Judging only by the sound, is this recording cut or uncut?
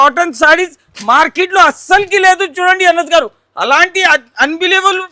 uncut